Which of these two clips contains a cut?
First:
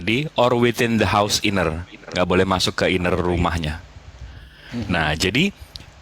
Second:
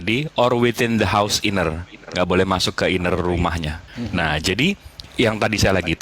second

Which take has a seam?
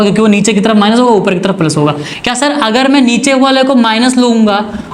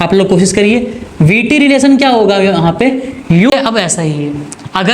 second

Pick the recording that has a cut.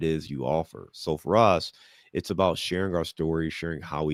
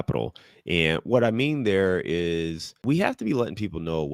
second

